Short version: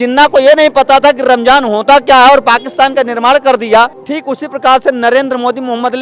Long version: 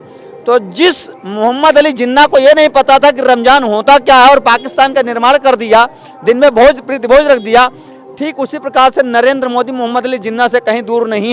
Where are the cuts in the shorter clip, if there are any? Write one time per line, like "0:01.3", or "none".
0:04.1